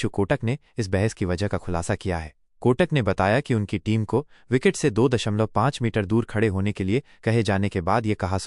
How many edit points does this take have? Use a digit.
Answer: 0